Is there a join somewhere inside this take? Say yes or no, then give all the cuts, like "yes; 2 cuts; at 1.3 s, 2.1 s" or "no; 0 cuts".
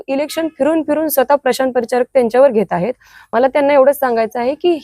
no; 0 cuts